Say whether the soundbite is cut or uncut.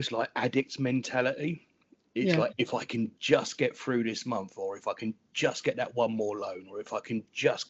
uncut